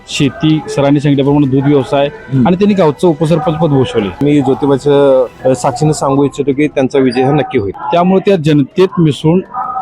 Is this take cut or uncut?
cut